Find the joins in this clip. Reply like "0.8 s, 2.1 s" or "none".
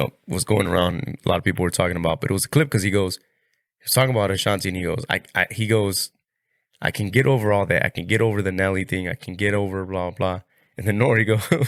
none